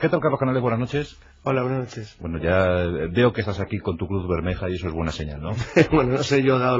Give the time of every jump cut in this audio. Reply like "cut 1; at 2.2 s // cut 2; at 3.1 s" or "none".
none